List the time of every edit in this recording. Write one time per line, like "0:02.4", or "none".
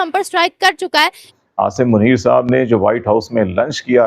0:01.3